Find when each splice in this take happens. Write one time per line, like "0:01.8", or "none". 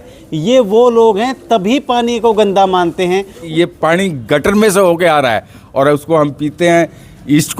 0:03.4